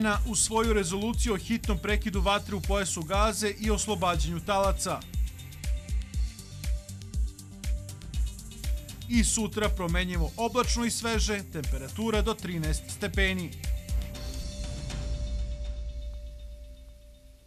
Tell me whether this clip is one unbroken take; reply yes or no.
yes